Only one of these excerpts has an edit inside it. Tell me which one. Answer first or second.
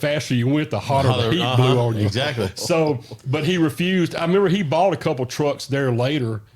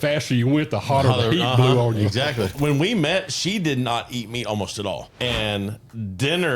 second